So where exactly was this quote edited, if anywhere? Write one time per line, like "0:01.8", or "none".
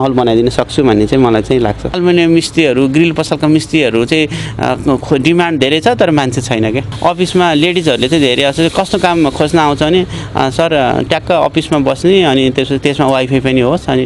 0:01.9
0:06.9